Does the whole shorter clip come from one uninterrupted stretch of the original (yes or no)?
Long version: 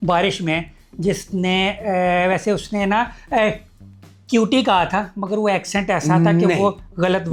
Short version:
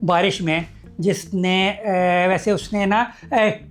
yes